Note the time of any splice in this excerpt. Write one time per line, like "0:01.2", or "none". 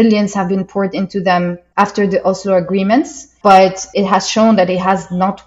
0:01.6
0:03.2
0:03.9